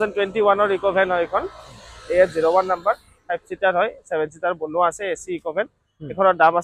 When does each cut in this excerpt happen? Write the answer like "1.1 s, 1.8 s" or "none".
none

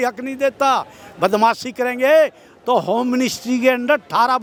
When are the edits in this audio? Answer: none

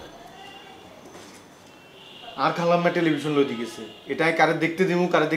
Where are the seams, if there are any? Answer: none

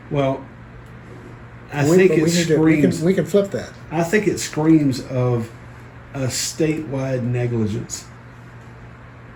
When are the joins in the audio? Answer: none

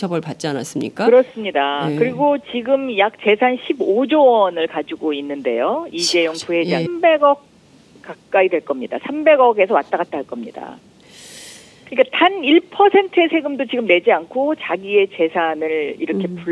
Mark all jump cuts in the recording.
none

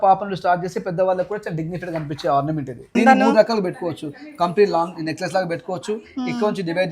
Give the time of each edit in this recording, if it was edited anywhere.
2.9 s

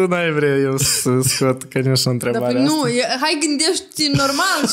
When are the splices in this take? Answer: none

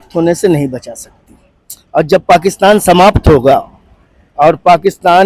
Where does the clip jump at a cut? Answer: none

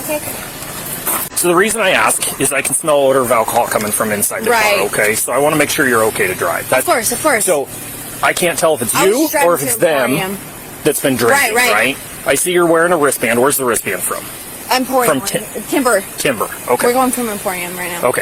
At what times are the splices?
1.3 s

